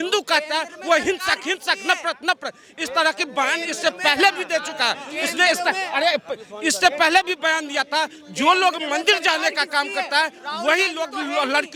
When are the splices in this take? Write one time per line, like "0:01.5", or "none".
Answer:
none